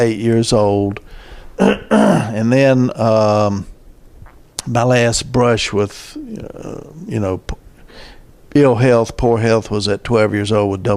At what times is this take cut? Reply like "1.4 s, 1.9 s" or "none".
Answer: 9.4 s